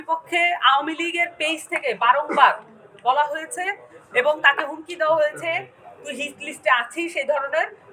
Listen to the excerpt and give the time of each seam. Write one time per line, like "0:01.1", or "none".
none

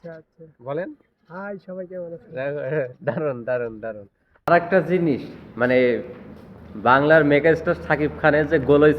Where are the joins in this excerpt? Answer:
0:04.4

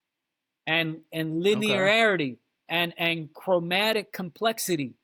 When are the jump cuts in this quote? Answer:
none

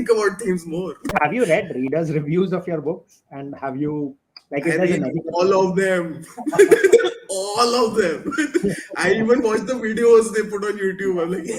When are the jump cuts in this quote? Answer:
0:01.0

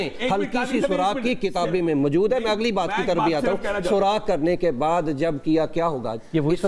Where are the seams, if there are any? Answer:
none

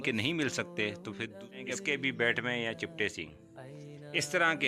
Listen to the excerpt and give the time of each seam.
0:01.3

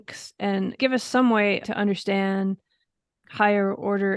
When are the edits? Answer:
0:00.8
0:01.6
0:03.2

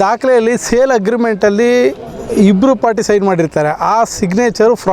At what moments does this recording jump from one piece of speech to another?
none

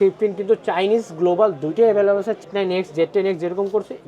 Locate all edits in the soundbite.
0:02.4

